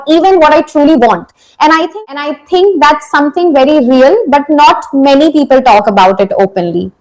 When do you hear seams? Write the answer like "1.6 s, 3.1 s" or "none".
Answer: 1.9 s

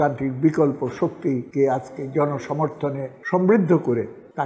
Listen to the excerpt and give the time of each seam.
none

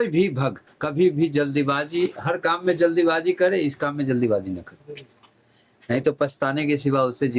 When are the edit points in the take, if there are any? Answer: none

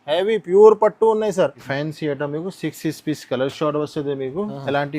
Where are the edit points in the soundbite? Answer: 1.6 s

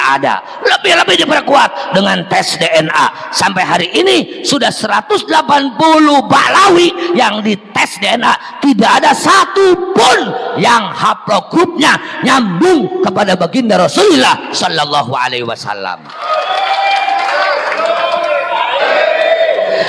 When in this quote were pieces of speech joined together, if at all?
18.8 s

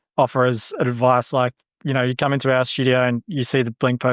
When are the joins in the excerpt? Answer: none

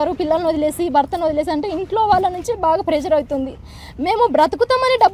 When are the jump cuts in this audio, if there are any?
none

